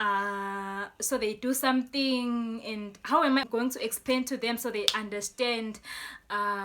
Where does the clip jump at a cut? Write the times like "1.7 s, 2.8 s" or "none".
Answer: 3.4 s